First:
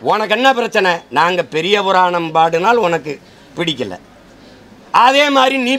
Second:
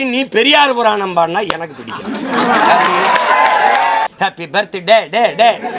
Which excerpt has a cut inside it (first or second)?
second